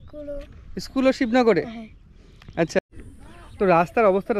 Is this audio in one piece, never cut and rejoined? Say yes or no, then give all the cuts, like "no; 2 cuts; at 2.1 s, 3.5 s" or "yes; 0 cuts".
no; 1 cut; at 2.8 s